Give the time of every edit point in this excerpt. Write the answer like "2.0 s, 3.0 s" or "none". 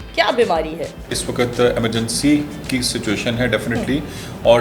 1.2 s